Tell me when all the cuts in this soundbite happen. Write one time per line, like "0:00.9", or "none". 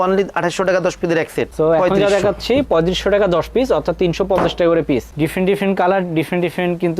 0:01.5
0:05.1